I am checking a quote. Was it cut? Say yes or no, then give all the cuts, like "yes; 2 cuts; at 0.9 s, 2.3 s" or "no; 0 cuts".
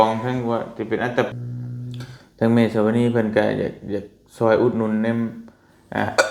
yes; 1 cut; at 1.3 s